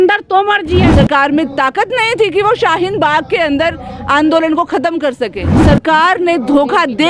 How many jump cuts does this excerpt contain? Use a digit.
2